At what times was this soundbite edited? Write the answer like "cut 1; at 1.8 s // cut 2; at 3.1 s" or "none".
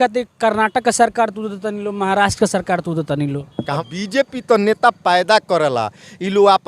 cut 1; at 3.7 s